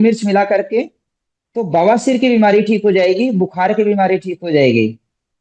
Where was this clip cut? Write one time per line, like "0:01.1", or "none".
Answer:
none